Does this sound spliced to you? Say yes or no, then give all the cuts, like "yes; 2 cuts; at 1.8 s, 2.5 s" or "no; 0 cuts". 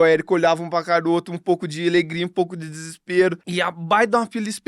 yes; 1 cut; at 3.4 s